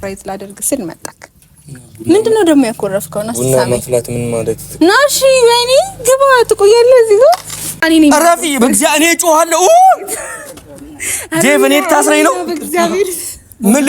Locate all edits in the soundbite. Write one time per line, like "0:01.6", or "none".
0:07.8